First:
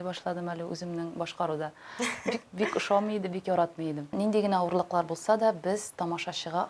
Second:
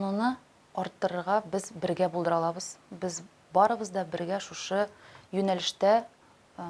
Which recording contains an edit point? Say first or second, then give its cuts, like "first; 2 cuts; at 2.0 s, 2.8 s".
first; 1 cut; at 4.1 s